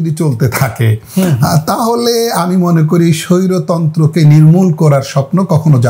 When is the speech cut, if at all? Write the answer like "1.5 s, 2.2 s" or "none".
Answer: none